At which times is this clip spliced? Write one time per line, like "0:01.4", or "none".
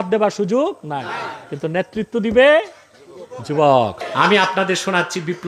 0:04.0